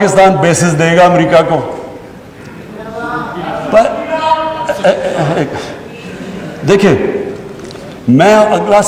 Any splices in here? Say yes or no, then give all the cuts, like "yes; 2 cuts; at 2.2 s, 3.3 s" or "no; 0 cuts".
no; 0 cuts